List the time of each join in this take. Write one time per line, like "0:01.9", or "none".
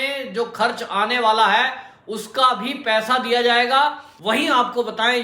0:04.1